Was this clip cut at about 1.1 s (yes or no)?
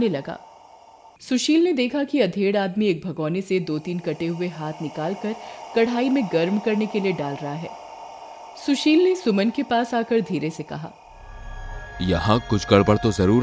yes